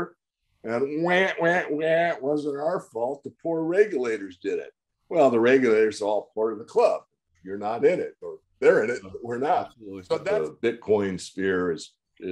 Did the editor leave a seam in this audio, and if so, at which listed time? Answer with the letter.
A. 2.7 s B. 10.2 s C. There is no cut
B